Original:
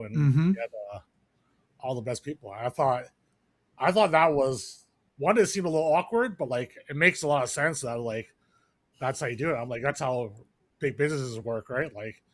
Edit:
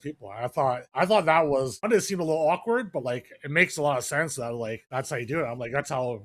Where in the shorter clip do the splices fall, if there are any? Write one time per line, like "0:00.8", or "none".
0:00.9
0:01.9
0:04.8

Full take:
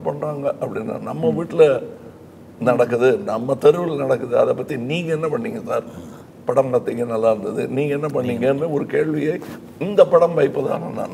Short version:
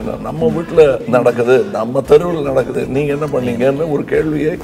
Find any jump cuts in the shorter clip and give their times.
0:01.0
0:02.7

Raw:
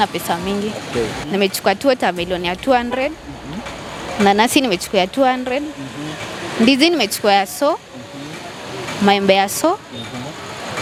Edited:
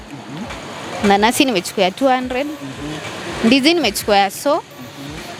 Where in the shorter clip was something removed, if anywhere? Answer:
none

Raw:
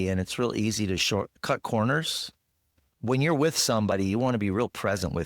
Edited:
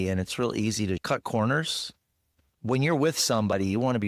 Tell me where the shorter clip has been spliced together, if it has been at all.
0:01.0

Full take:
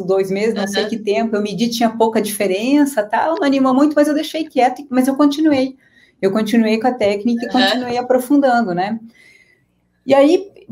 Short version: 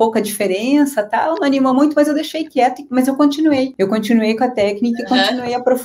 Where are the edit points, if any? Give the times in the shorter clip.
0:03.7

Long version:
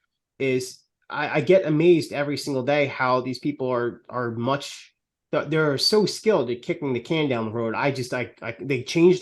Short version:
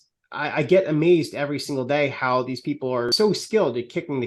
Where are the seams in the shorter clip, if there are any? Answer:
0:03.1

